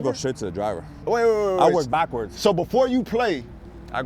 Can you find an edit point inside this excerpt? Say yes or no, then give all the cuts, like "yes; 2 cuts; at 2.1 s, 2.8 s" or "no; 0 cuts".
yes; 1 cut; at 1.0 s